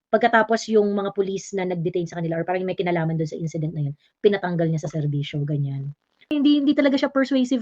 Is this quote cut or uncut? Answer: cut